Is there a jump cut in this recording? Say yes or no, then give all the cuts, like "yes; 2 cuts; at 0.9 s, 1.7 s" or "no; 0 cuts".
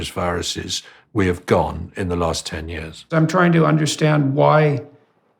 yes; 1 cut; at 3.1 s